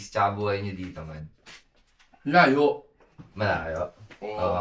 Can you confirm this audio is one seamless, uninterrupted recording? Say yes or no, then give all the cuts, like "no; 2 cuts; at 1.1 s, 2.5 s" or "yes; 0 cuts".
yes; 0 cuts